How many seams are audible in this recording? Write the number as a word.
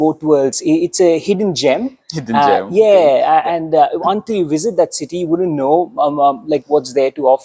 zero